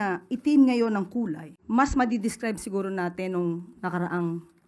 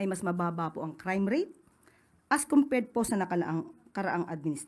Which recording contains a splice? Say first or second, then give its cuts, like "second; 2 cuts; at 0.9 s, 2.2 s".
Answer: first; 1 cut; at 1.5 s